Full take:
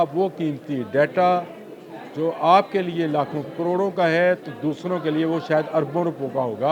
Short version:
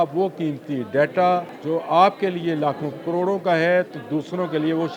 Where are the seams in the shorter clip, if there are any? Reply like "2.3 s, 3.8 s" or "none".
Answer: 1.5 s